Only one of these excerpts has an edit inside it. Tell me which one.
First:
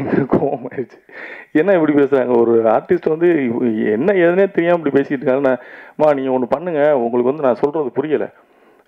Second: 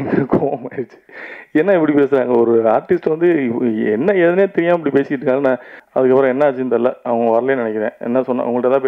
second; 1 cut; at 5.7 s

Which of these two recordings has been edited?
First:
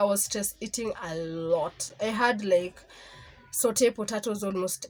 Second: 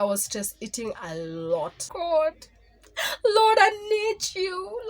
second; 1 cut; at 1.8 s

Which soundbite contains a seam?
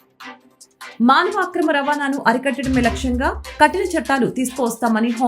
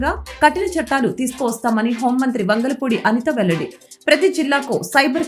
first; 1 cut; at 0.9 s

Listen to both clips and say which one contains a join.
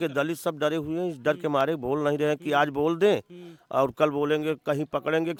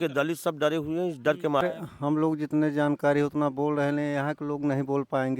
second; 1 cut; at 1.6 s

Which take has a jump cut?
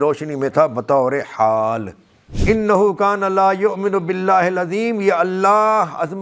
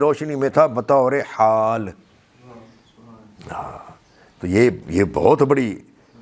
first; 1 cut; at 2.2 s

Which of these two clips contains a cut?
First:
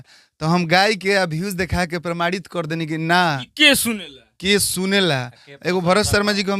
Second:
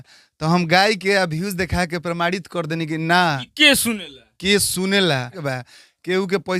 second; 1 cut; at 5.5 s

